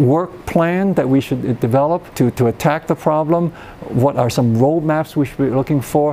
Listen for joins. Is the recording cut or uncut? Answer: cut